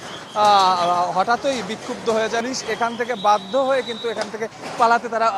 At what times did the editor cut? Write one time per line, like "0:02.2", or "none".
0:02.4